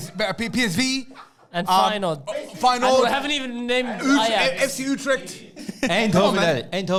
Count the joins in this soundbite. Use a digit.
0